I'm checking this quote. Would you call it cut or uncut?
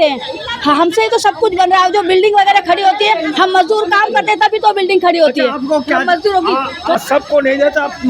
cut